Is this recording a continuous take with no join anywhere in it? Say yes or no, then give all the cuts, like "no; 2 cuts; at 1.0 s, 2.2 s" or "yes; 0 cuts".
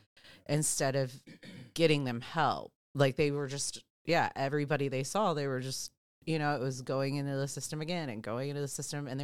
yes; 0 cuts